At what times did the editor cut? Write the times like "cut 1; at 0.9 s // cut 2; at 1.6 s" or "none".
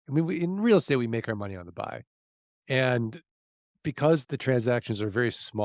cut 1; at 4.2 s